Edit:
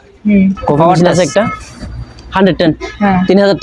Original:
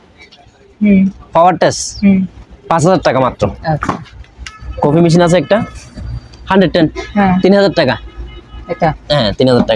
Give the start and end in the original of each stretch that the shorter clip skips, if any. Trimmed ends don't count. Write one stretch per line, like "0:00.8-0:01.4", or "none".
0:01.5-0:05.1

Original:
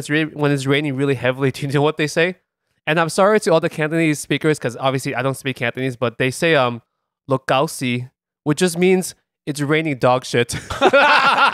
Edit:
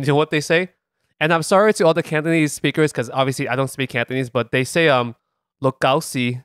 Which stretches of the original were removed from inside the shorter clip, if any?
none

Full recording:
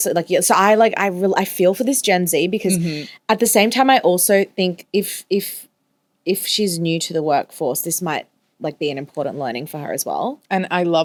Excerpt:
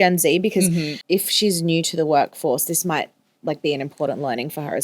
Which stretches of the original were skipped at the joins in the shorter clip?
0:03.0-0:06.1

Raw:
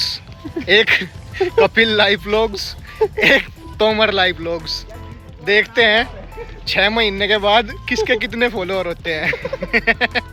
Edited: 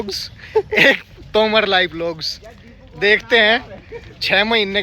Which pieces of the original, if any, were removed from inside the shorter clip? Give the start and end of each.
none

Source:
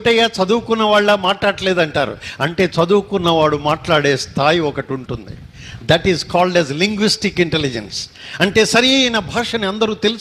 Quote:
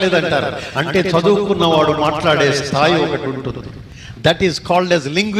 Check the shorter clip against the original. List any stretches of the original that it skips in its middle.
none

